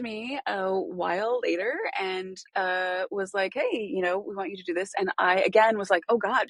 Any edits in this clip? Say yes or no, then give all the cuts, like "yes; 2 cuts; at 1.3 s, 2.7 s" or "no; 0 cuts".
no; 0 cuts